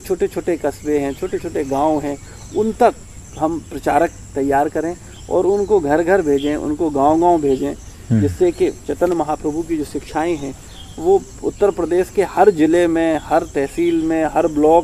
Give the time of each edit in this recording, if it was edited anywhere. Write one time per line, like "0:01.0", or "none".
none